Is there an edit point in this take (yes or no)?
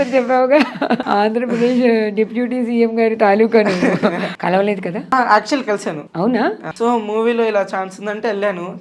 yes